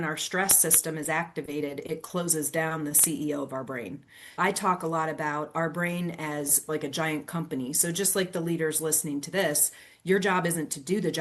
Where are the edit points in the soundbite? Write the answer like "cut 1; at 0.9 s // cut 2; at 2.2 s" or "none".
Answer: cut 1; at 4.4 s